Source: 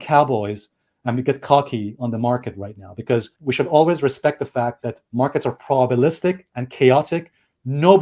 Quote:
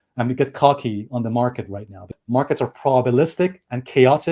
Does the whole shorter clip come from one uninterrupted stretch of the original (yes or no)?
no